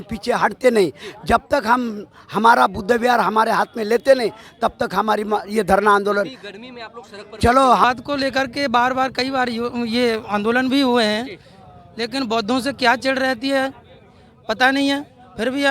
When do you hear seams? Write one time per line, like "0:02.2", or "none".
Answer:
0:07.8